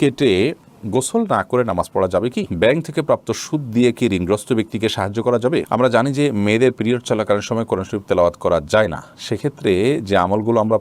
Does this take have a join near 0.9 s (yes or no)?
no